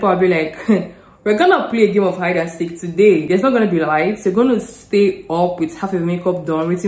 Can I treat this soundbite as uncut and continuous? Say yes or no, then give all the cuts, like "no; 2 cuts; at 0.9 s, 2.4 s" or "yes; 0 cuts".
yes; 0 cuts